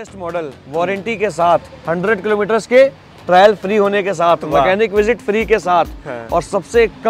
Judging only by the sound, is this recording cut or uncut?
uncut